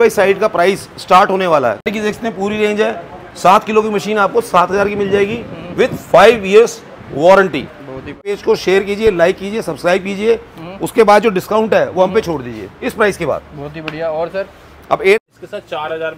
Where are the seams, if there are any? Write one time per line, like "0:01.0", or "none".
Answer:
0:01.9
0:08.4
0:15.2

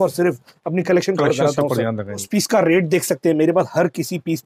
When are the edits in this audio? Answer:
0:02.3

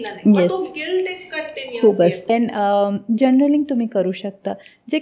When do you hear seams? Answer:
0:02.3

